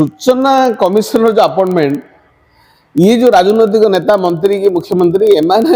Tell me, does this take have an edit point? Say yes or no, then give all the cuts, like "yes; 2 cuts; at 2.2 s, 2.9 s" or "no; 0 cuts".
no; 0 cuts